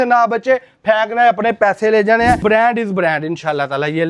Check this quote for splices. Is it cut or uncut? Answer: cut